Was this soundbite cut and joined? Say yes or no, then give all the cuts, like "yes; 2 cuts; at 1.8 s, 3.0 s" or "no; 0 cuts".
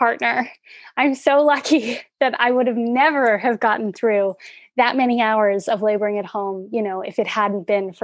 no; 0 cuts